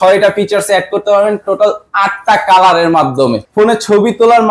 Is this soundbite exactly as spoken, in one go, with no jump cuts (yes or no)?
no